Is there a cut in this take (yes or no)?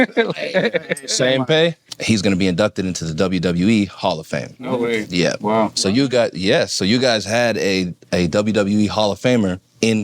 yes